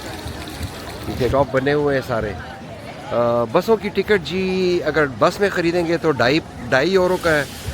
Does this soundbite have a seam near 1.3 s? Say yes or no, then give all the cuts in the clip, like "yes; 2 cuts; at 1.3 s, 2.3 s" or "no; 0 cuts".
yes; 1 cut; at 1.3 s